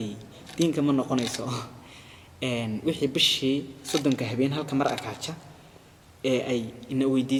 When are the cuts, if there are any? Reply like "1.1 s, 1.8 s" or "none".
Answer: none